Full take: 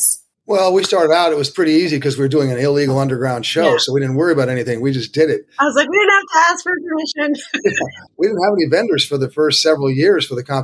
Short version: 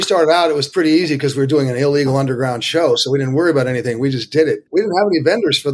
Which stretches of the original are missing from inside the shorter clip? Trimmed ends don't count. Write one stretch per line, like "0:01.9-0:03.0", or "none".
0:05.5-0:08.1